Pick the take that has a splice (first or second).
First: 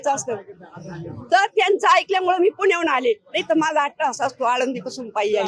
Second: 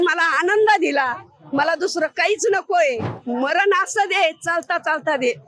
second